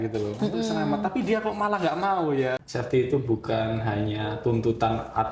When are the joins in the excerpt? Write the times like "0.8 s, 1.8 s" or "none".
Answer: 2.6 s